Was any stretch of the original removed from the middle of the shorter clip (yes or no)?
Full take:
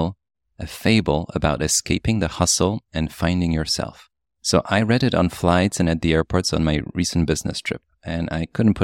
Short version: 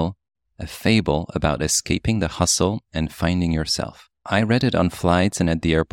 yes